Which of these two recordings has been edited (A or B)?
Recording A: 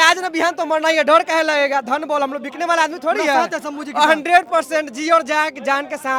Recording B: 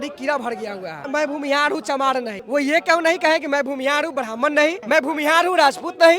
B